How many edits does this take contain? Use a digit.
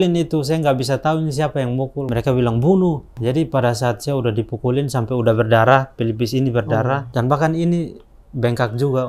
3